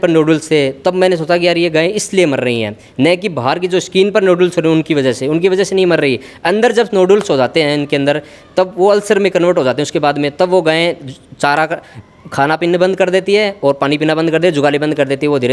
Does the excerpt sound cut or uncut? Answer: uncut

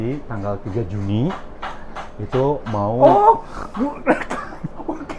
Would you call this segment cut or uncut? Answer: uncut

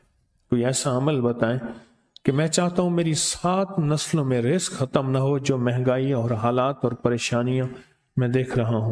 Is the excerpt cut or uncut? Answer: uncut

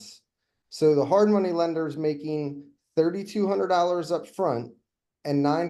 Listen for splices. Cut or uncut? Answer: uncut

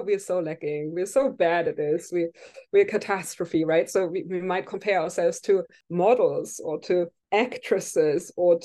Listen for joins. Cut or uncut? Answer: cut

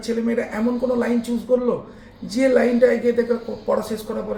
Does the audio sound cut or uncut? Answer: uncut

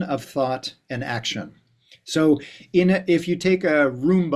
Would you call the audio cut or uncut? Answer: uncut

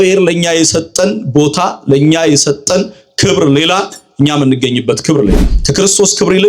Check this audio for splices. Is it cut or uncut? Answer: cut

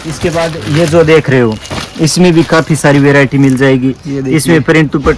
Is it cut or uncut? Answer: uncut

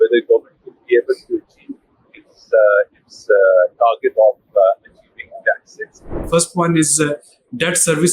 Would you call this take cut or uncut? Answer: cut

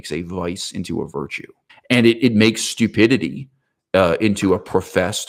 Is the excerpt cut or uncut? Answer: uncut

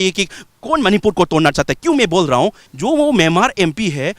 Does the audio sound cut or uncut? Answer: cut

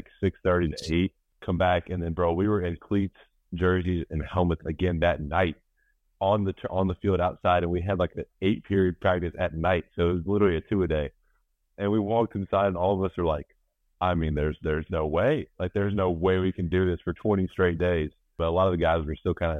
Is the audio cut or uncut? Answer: cut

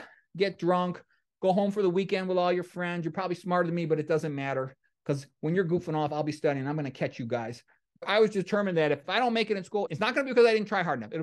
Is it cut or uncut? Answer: cut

